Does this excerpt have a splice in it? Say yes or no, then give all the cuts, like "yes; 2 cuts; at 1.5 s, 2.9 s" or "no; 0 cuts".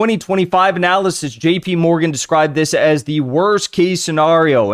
no; 0 cuts